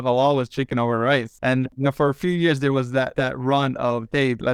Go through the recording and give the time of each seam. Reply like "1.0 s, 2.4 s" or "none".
1.6 s, 3.1 s